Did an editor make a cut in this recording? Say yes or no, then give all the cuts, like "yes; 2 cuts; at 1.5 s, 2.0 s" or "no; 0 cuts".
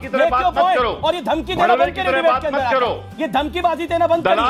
no; 0 cuts